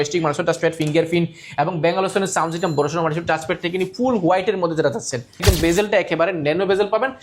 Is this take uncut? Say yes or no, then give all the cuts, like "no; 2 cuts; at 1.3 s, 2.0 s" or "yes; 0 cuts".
no; 1 cut; at 5.4 s